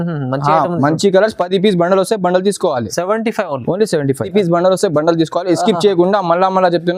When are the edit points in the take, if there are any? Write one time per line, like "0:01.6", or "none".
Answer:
0:04.3